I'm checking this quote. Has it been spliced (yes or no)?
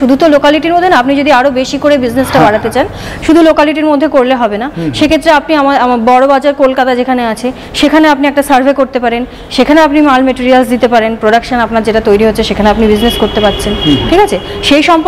no